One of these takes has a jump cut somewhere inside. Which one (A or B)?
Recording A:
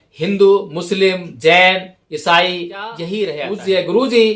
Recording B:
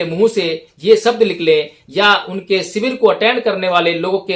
A